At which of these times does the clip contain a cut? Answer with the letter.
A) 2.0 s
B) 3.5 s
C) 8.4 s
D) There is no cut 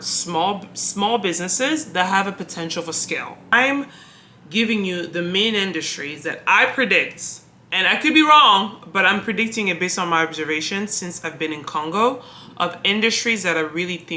B